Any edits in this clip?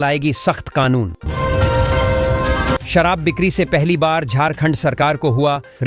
no; 0 cuts

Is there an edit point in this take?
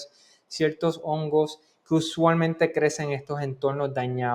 no; 0 cuts

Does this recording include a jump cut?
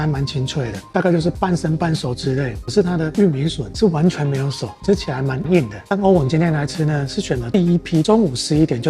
yes; 4 cuts; at 0.9 s, 2.6 s, 5.8 s, 8.1 s

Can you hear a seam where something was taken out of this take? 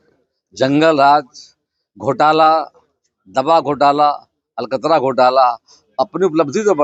no; 0 cuts

